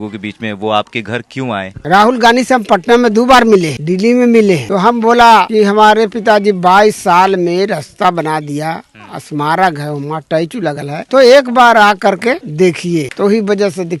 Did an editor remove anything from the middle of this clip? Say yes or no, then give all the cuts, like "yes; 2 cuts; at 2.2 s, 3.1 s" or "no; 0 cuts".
no; 0 cuts